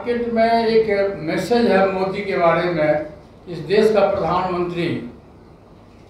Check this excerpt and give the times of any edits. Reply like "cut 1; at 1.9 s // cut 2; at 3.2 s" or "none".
none